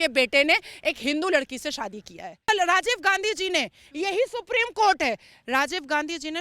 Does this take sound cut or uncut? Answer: cut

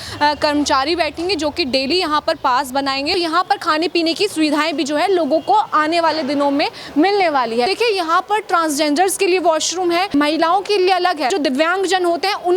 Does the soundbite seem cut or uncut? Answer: cut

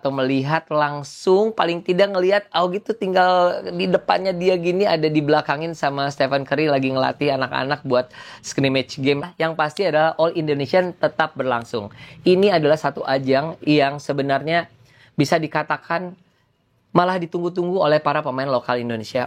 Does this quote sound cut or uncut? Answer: cut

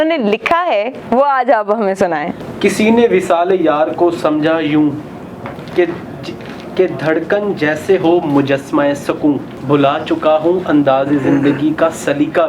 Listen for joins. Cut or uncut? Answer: cut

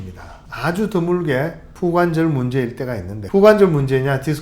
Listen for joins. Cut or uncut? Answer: cut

